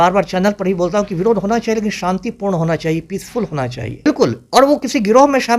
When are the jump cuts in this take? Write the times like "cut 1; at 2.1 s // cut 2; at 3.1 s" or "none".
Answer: cut 1; at 4.1 s